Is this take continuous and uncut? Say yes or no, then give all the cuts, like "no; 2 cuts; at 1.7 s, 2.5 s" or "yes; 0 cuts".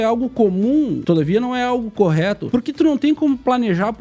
no; 2 cuts; at 1.0 s, 2.4 s